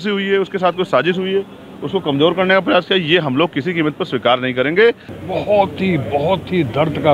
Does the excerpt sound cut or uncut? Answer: uncut